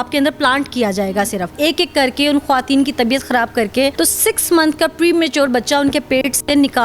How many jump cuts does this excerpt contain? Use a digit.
2